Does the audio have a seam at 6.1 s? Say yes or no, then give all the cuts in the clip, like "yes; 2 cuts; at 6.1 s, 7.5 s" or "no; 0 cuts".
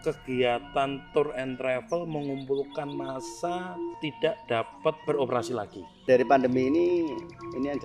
yes; 3 cuts; at 4.0 s, 5.0 s, 6.1 s